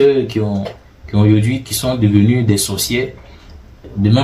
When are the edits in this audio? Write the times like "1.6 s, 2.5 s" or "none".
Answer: none